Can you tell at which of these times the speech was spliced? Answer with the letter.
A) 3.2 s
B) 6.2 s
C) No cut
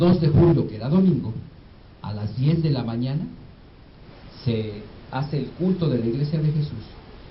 B